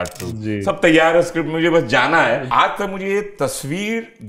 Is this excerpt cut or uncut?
cut